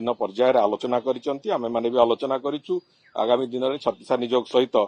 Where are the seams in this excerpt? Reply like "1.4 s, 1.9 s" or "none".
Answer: none